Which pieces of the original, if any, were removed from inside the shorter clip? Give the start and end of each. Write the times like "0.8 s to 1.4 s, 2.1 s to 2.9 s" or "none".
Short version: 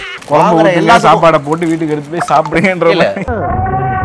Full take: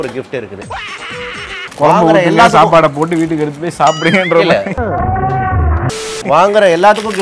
none